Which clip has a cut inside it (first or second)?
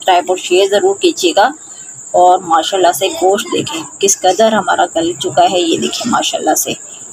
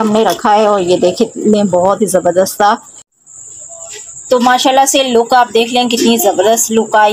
second